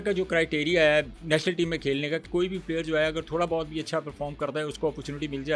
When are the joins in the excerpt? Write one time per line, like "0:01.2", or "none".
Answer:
0:01.2
0:02.2